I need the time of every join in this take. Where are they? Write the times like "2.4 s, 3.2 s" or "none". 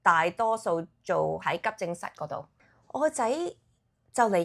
2.6 s